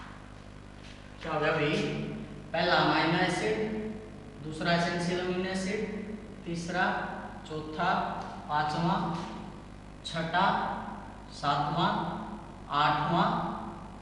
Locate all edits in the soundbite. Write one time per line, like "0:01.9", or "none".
none